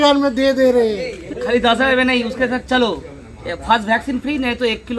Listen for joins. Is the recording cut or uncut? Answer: cut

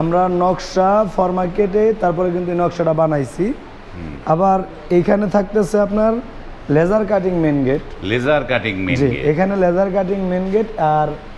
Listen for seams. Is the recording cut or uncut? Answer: uncut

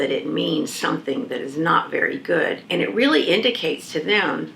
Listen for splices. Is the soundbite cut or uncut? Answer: cut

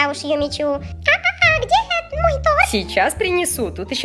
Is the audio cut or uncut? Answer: cut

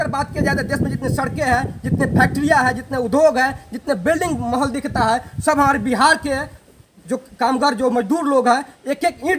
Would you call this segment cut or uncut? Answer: uncut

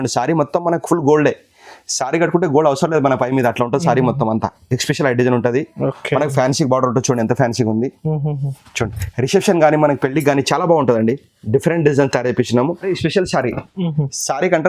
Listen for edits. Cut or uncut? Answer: cut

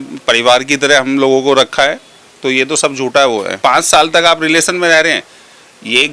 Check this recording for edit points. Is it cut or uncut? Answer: cut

